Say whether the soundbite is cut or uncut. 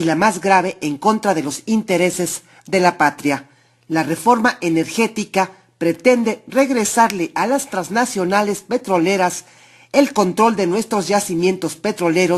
uncut